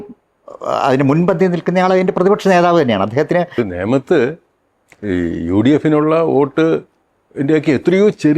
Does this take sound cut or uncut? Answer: cut